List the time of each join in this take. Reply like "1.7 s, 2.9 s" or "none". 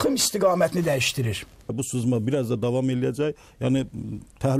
1.8 s